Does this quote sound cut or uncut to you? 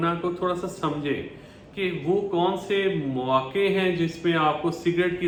uncut